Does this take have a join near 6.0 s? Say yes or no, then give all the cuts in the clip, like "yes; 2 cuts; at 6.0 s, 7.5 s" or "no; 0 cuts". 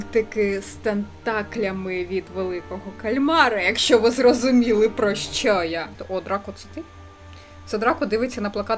yes; 1 cut; at 6.0 s